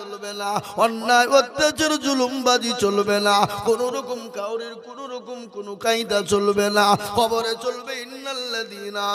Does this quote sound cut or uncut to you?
uncut